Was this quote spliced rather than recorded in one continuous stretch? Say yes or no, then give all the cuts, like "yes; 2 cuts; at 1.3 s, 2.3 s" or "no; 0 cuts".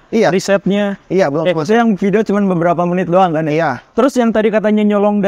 no; 0 cuts